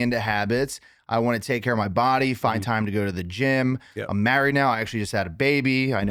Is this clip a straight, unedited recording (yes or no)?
yes